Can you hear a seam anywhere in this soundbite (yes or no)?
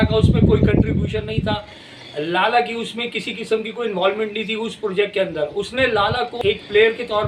yes